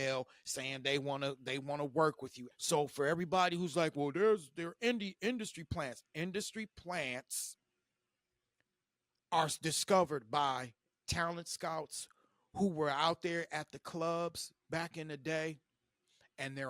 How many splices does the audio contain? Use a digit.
1